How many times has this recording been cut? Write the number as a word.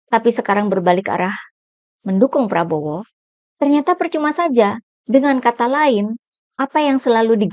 one